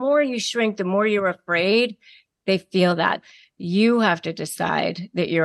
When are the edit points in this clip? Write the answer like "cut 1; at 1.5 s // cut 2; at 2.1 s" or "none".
cut 1; at 3.2 s